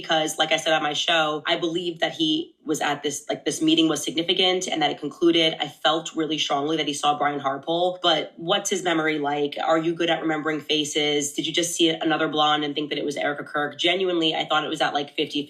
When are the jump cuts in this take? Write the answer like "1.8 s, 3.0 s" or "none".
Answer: none